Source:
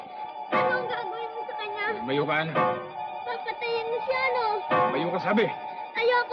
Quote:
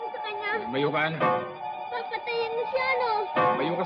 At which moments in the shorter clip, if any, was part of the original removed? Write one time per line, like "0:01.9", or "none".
none